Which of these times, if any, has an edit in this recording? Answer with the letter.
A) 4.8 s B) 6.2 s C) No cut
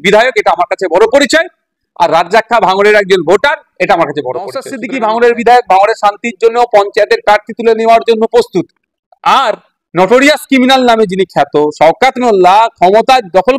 A